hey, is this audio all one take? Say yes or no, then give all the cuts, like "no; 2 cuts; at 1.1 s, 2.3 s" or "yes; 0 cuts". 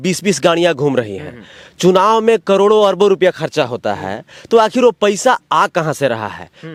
yes; 0 cuts